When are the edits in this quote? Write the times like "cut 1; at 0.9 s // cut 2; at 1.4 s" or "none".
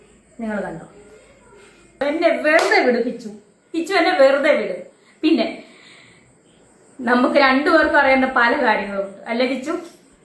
cut 1; at 2.0 s